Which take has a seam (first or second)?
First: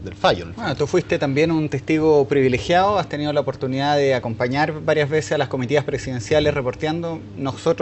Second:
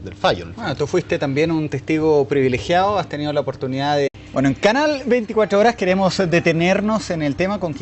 first